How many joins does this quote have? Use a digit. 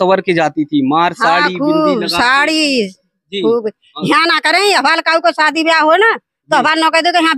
0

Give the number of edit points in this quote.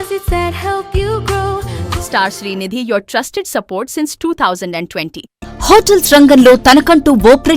2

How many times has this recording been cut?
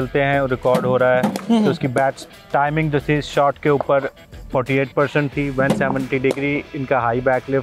0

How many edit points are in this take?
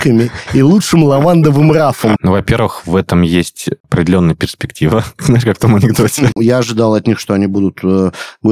3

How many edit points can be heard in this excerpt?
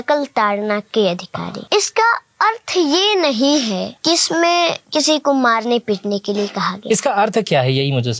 3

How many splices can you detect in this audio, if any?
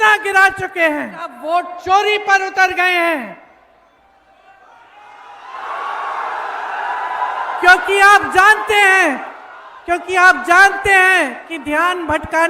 1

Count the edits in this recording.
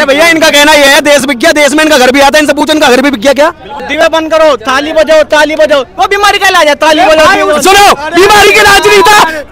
1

